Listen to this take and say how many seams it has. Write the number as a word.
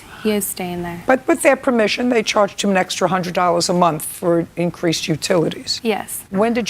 two